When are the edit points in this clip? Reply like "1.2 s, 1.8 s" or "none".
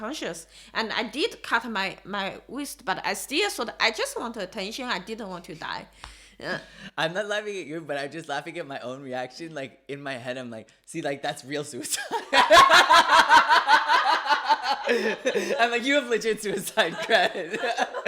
none